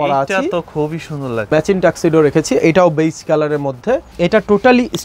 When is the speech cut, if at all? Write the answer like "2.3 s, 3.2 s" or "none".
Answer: 1.5 s, 4.1 s